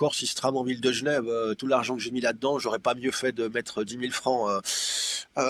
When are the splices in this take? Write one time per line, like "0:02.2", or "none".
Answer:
none